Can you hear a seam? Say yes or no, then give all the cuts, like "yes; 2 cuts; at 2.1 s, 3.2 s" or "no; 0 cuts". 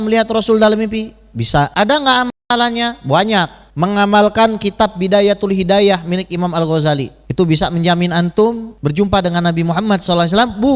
yes; 4 cuts; at 1.7 s, 3.6 s, 7.2 s, 8.7 s